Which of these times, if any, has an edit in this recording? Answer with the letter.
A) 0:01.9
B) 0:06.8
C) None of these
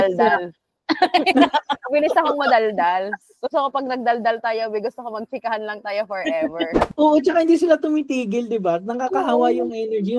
B